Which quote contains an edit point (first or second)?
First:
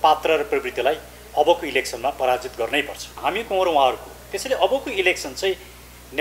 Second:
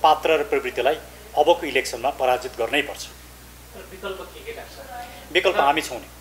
first